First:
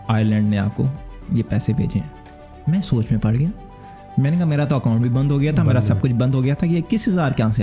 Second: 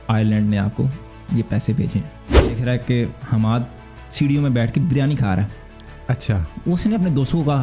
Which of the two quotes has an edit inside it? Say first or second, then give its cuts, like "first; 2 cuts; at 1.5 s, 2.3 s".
second; 1 cut; at 2.6 s